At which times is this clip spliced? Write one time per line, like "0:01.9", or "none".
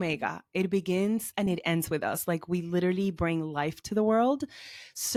none